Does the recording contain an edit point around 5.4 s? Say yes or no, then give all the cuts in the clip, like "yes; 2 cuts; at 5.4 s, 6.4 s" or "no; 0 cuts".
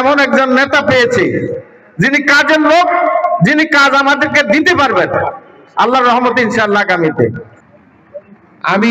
no; 1 cut; at 7.4 s